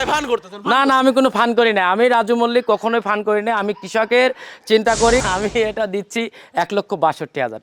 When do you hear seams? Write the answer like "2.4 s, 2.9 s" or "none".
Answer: 5.2 s

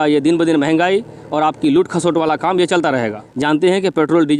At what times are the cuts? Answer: 3.3 s

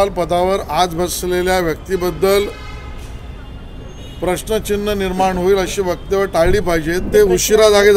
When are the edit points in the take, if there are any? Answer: 7.0 s

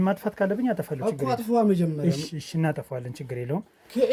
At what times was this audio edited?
none

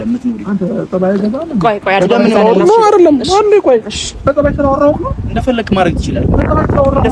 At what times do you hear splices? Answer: none

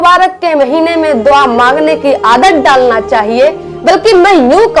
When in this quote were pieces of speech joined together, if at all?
none

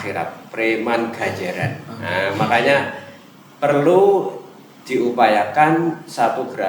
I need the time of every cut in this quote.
none

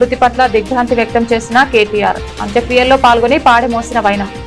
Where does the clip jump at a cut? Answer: none

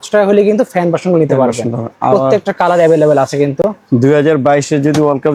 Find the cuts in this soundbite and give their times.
none

